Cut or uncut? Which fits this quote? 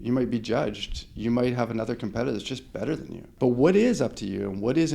cut